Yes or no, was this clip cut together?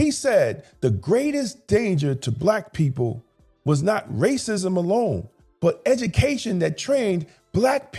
no